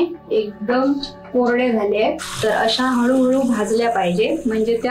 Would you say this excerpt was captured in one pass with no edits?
no; 1 cut; at 2.2 s

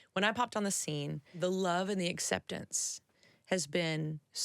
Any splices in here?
yes; 1 cut; at 1.4 s

